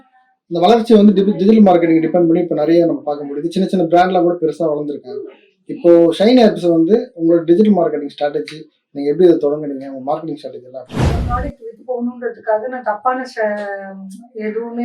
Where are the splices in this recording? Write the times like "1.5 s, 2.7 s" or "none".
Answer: 11.2 s